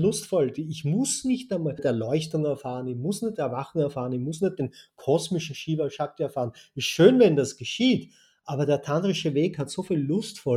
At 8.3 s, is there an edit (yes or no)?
no